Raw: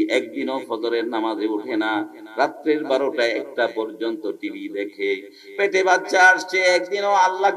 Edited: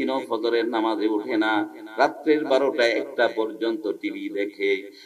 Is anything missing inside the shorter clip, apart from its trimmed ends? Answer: no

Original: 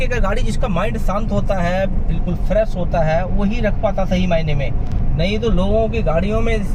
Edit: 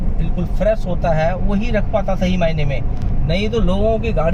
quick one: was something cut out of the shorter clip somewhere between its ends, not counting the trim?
no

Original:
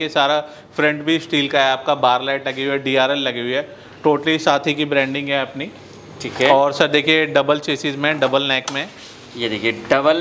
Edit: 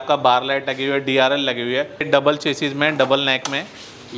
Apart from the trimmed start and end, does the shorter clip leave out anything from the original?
yes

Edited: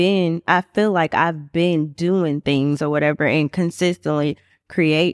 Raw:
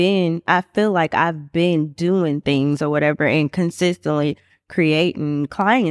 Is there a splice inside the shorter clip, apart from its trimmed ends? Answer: no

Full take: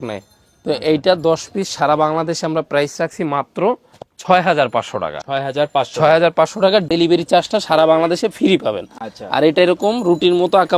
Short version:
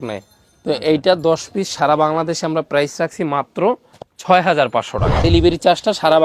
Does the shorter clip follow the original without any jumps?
no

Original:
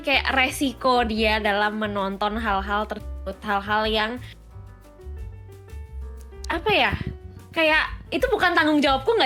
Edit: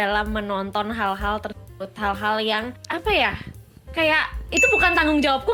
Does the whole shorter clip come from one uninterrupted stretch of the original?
no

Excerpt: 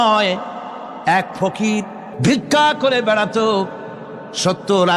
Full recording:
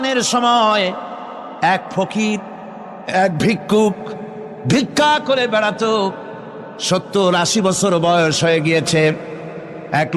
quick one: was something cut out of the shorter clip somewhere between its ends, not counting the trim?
yes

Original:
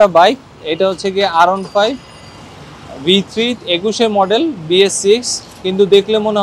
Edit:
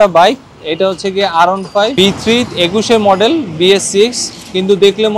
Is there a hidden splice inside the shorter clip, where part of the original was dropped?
yes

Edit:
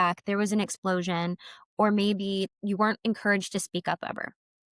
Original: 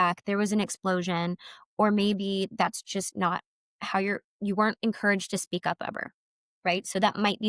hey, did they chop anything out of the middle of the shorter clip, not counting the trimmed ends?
yes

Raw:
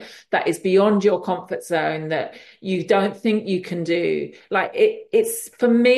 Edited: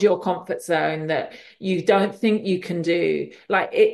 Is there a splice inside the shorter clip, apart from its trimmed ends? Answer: no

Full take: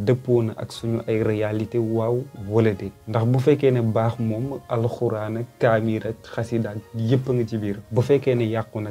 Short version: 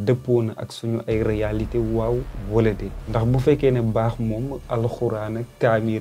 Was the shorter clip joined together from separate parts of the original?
no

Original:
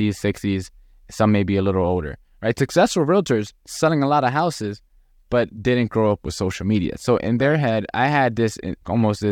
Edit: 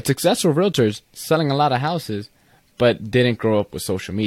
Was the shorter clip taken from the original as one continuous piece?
yes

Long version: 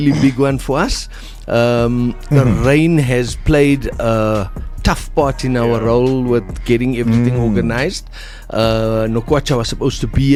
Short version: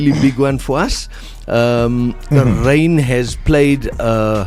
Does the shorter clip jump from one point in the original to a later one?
no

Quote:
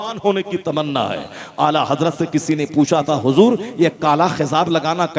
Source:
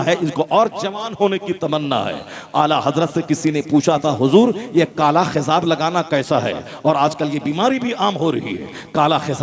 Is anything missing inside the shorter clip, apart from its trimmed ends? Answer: no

